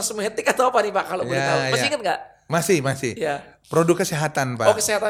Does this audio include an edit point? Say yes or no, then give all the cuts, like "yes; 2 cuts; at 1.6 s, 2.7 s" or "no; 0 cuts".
no; 0 cuts